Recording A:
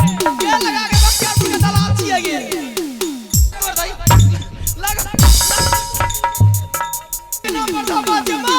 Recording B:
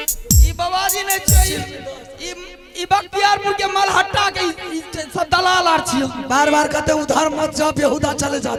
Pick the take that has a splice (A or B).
A